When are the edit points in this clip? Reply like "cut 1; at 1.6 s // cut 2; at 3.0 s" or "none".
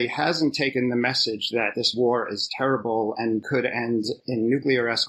none